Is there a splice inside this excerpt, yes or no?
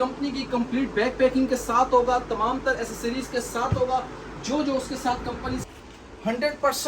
yes